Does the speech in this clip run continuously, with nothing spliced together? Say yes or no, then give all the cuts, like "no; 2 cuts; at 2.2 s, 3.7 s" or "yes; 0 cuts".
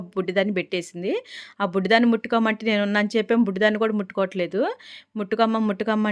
yes; 0 cuts